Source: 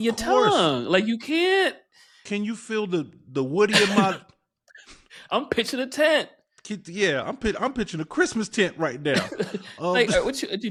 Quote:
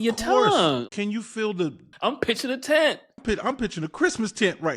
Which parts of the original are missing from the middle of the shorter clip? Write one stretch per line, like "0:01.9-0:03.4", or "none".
0:00.8-0:02.2
0:03.2-0:05.1
0:06.4-0:07.3